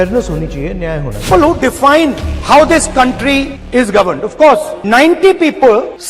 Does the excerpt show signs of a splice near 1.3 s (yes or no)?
yes